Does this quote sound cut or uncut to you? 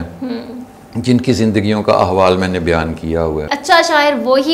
cut